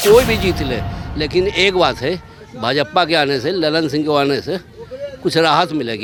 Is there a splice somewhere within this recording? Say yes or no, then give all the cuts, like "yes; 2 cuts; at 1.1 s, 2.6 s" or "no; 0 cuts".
no; 0 cuts